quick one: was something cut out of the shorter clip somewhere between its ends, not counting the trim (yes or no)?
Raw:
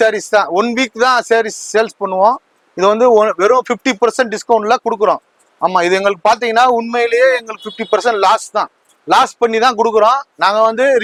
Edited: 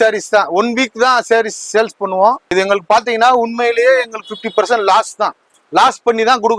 yes